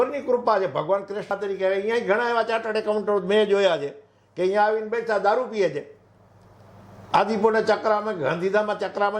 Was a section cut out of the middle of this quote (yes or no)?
yes